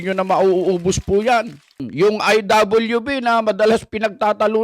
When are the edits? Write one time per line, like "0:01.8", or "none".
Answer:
0:01.8